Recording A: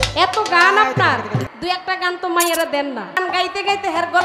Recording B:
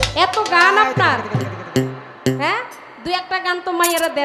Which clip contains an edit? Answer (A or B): A